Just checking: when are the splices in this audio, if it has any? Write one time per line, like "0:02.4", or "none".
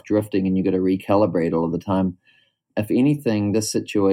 0:02.7